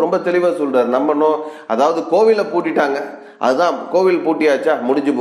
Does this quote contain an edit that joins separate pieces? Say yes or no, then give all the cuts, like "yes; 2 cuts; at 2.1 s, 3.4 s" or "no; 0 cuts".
no; 0 cuts